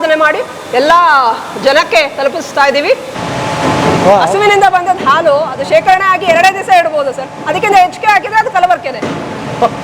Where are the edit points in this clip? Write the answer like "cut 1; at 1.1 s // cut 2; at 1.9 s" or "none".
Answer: cut 1; at 3.1 s

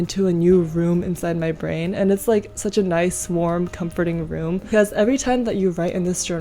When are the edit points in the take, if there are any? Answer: cut 1; at 4.6 s

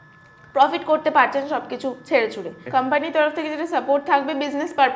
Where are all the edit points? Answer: cut 1; at 2.6 s

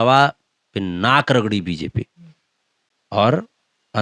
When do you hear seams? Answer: none

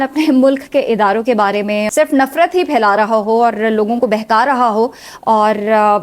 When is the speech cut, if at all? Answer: cut 1; at 1.9 s

